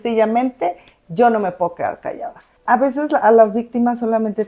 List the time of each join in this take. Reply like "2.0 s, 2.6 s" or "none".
2.5 s

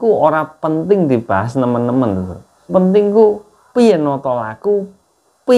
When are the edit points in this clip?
2.7 s

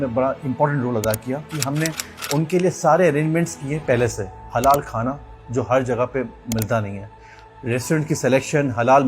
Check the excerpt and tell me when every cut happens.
1.6 s

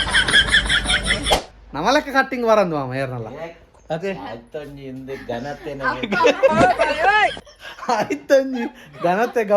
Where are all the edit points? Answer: 1.4 s

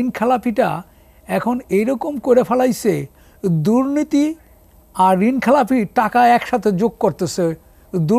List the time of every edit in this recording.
none

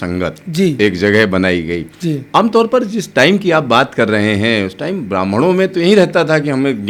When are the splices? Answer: none

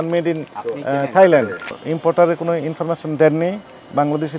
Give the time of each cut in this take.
1.8 s

